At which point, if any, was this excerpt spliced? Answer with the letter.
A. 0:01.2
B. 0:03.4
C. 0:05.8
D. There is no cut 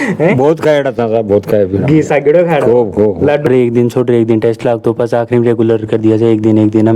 B